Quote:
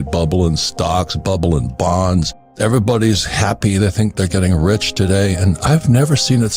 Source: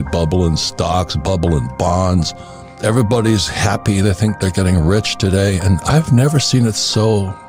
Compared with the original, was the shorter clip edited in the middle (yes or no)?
yes